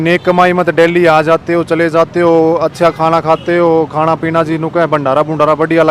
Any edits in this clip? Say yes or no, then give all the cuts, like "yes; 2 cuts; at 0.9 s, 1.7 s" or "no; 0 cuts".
no; 0 cuts